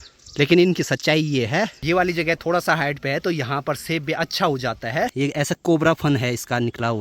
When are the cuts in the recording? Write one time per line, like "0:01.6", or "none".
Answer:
0:01.8
0:05.1